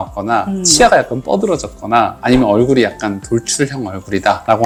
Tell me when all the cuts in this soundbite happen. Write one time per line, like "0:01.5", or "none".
none